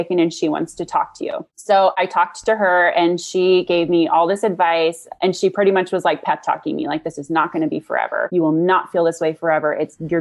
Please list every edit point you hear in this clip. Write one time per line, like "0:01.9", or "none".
0:01.5
0:08.3